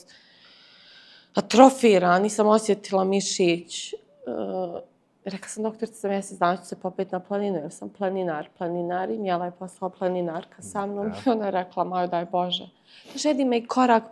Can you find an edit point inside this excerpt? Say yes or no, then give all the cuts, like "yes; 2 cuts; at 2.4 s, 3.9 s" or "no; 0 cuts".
no; 0 cuts